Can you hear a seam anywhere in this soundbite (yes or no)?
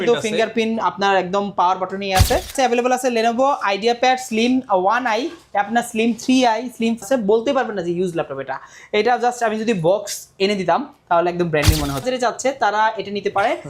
yes